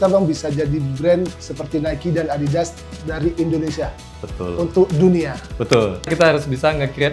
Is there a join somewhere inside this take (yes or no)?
yes